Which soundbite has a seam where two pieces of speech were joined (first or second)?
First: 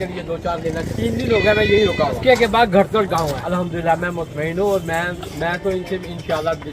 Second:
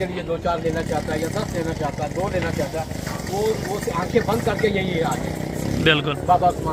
first